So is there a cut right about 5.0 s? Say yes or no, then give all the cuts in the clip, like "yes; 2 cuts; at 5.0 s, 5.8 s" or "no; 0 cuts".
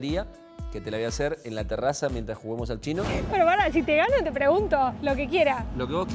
yes; 2 cuts; at 3.2 s, 5.0 s